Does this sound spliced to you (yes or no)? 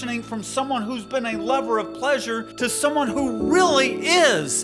yes